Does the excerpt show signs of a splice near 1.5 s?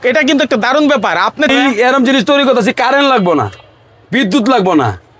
yes; 1 cut; at 1.5 s

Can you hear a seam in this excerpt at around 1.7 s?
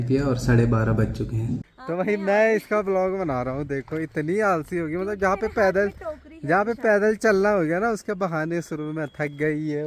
yes; 1 cut; at 1.7 s

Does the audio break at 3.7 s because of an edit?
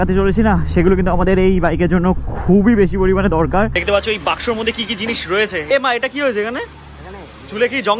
yes; 2 cuts; at 3.7 s, 5.7 s

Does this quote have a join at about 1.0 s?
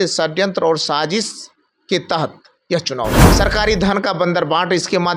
no; 1 cut; at 3.3 s

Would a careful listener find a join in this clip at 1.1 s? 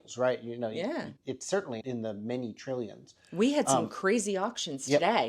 yes; 1 cut; at 1.1 s

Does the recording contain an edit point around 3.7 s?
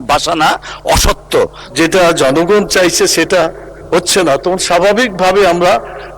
no; 1 cut; at 1.6 s

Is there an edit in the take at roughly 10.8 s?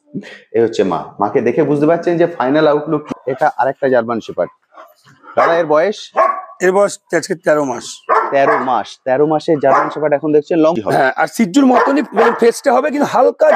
yes; 2 cuts; at 3.1 s, 10.8 s

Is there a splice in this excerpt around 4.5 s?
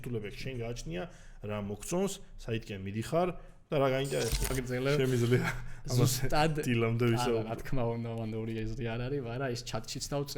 yes; 1 cut; at 4.5 s

